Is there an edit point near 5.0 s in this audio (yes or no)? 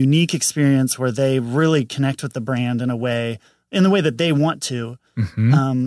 no